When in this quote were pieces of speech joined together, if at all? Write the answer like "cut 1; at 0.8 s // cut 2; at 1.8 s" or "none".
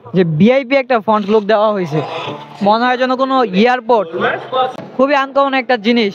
cut 1; at 4.7 s